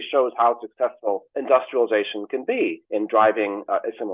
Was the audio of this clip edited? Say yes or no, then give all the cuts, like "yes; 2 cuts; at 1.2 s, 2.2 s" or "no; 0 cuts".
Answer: yes; 2 cuts; at 1.3 s, 2.8 s